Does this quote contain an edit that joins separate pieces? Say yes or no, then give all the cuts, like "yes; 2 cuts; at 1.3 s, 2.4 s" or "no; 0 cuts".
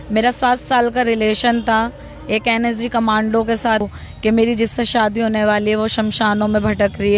yes; 1 cut; at 3.8 s